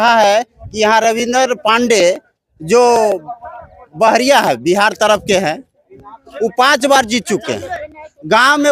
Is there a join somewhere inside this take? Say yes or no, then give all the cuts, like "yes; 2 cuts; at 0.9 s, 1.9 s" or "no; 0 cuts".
no; 0 cuts